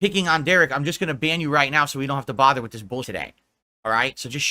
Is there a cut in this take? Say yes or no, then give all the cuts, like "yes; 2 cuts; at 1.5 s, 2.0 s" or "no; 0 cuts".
yes; 1 cut; at 3.1 s